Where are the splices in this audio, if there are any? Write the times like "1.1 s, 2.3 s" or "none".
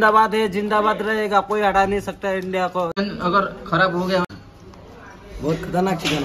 3.0 s, 4.2 s